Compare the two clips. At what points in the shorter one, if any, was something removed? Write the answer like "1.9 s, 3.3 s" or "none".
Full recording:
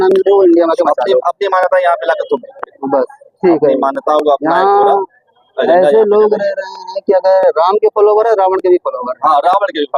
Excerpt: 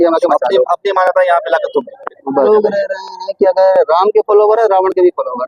2.5 s